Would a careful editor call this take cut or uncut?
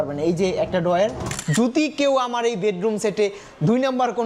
cut